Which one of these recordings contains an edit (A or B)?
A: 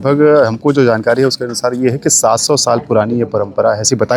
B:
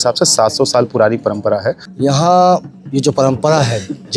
B